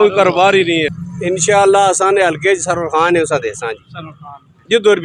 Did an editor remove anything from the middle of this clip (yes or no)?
yes